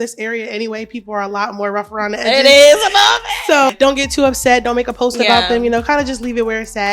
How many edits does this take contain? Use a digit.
1